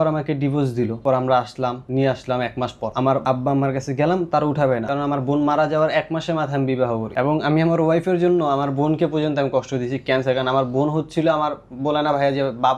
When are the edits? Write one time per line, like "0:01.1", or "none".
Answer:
0:01.0
0:01.8
0:03.2
0:04.9
0:07.1